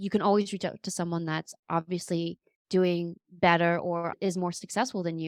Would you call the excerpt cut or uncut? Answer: uncut